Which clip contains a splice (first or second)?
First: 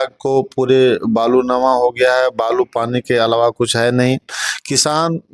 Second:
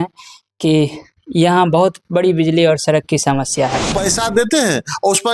second